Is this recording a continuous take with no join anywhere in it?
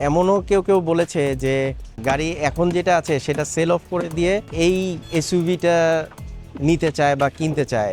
no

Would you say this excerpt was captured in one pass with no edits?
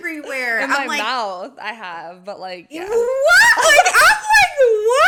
yes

